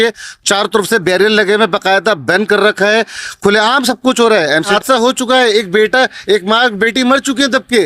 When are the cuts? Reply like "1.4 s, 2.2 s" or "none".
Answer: 4.7 s